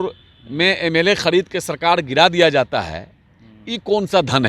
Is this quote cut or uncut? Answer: uncut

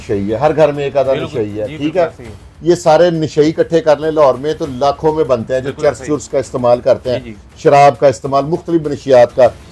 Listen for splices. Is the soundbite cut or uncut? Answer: uncut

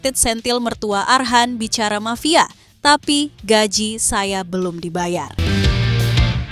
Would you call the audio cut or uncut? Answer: cut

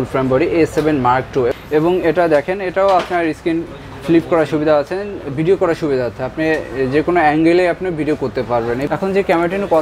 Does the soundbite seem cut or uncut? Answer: cut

